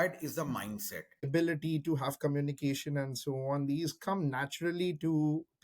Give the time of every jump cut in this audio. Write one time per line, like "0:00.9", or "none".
0:01.3